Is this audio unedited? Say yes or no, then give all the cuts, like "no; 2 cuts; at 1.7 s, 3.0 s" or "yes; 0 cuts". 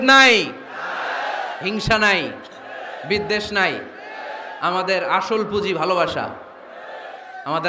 yes; 0 cuts